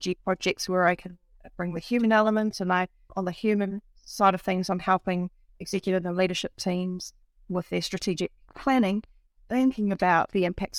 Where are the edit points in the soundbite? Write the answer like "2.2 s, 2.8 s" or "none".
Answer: none